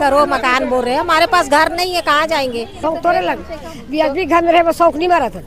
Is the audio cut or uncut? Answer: cut